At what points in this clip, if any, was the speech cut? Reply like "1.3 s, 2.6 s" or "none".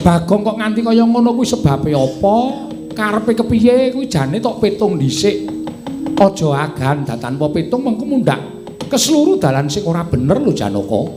none

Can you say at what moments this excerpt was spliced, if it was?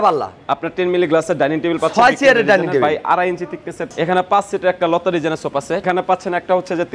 3.9 s, 5.8 s

